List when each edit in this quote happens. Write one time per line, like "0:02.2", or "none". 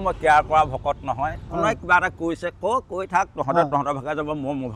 none